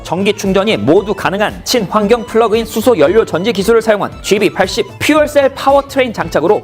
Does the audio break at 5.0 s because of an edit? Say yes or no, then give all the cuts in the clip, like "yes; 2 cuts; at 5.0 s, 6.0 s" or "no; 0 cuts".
no; 1 cut; at 3.1 s